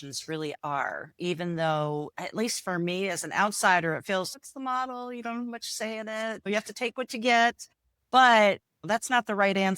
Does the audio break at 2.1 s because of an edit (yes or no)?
yes